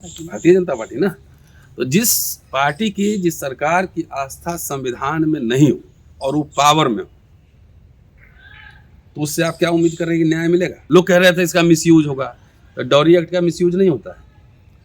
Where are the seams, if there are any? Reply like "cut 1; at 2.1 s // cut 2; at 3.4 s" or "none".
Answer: cut 1; at 10.8 s

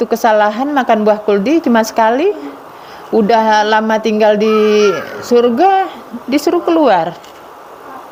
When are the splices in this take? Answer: none

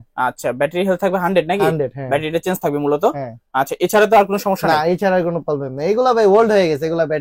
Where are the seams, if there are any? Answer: none

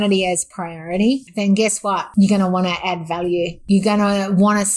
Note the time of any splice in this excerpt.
cut 1; at 2.0 s // cut 2; at 3.6 s

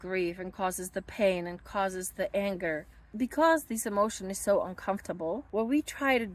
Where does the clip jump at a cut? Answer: cut 1; at 3.0 s // cut 2; at 5.5 s

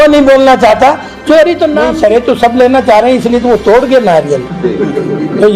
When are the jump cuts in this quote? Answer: cut 1; at 1.8 s

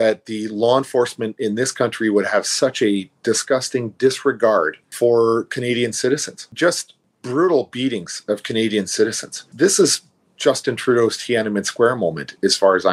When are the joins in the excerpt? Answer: cut 1; at 4.8 s // cut 2; at 6.4 s

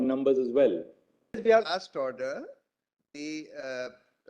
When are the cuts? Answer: cut 1; at 1.4 s

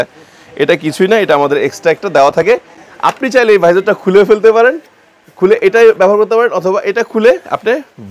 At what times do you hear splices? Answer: none

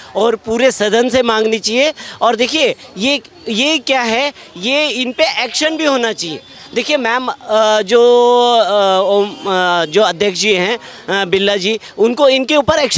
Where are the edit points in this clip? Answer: none

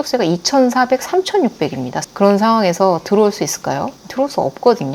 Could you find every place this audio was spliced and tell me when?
cut 1; at 1.9 s

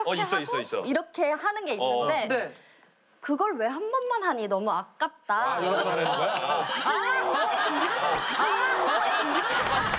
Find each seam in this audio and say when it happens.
none

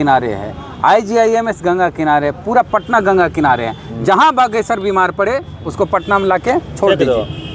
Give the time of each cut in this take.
none

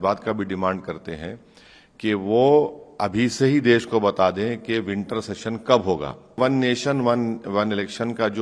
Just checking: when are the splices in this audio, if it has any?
cut 1; at 6.4 s

